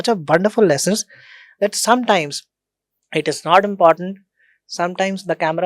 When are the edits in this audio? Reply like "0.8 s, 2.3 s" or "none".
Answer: none